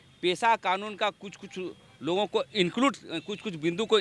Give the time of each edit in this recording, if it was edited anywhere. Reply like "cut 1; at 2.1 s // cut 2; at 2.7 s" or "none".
none